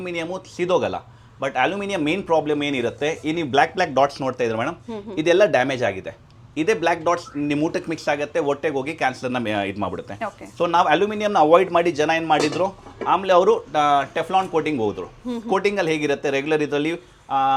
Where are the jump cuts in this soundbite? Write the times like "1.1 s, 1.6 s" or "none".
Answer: none

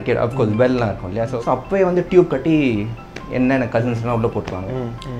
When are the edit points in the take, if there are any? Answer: 1.3 s

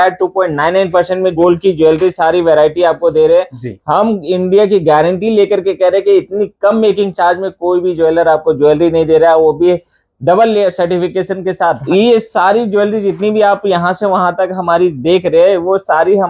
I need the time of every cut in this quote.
1.4 s, 11.8 s

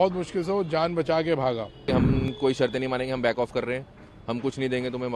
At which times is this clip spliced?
1.9 s

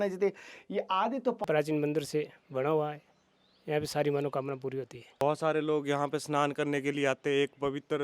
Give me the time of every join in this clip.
1.4 s, 5.2 s

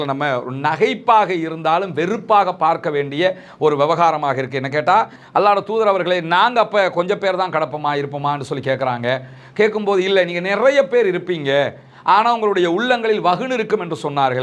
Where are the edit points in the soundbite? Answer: 5.2 s

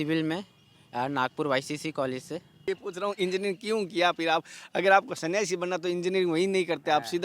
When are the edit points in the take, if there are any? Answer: 2.7 s

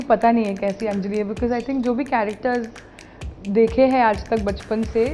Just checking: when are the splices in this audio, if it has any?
none

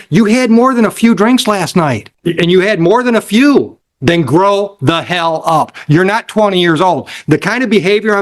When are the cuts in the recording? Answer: 2.1 s, 3.9 s

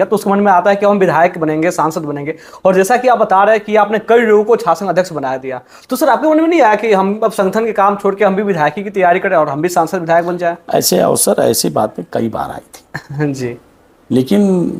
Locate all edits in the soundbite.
none

